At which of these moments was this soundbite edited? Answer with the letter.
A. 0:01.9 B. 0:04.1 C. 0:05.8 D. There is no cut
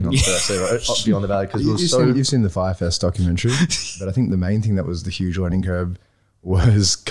B